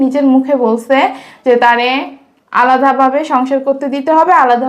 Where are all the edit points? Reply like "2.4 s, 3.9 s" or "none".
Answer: none